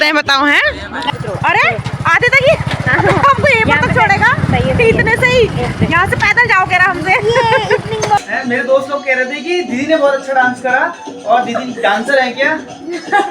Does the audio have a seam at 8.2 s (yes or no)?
yes